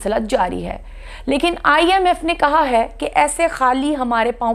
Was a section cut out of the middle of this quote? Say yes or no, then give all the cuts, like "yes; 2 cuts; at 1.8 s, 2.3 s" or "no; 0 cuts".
no; 0 cuts